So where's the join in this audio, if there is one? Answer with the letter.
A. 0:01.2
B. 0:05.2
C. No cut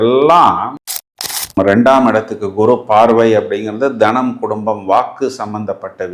A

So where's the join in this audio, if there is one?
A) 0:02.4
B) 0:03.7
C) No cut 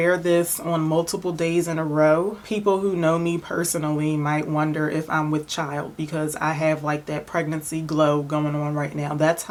C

